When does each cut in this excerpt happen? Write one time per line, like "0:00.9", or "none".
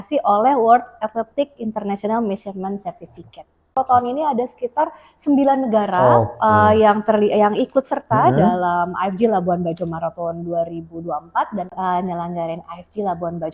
0:03.8
0:11.7